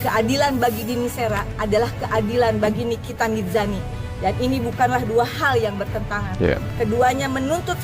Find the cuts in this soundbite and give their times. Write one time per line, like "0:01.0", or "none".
none